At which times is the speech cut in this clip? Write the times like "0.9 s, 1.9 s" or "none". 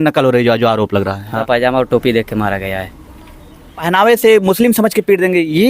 1.4 s, 3.8 s